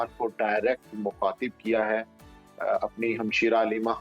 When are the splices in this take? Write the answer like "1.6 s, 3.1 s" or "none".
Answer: none